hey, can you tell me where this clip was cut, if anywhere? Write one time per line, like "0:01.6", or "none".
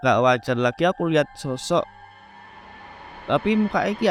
none